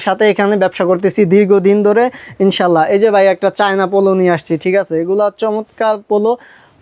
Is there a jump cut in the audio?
no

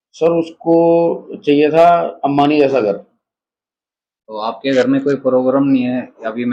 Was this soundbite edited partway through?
no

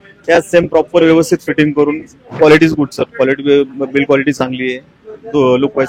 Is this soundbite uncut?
no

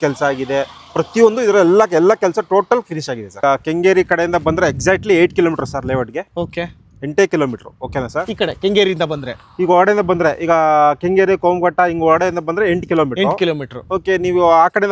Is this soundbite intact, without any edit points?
no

